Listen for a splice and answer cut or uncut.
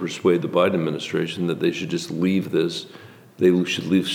uncut